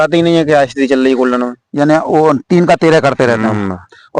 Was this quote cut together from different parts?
no; 0 cuts

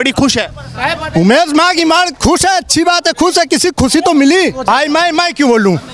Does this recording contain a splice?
yes; 1 cut; at 4.6 s

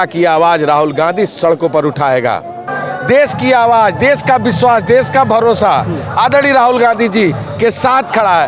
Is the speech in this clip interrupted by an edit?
yes; 1 cut; at 2.7 s

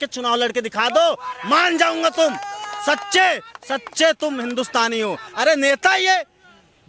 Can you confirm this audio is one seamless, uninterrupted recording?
yes; 0 cuts

